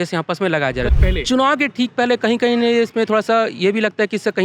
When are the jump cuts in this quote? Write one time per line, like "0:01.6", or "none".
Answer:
0:00.9